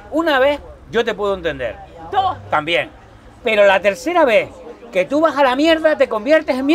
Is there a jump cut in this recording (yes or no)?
no